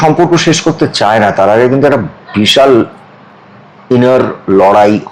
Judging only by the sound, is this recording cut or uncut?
uncut